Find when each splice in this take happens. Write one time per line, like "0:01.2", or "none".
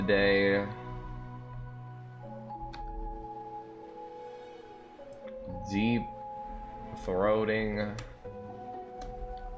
none